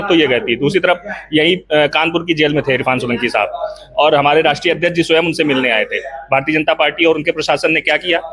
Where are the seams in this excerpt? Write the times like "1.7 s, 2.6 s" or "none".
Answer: none